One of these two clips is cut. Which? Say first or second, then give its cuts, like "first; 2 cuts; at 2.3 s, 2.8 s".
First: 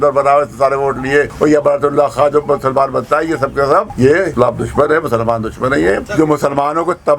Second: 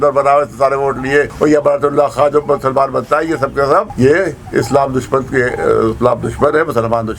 first; 2 cuts; at 4.3 s, 6.0 s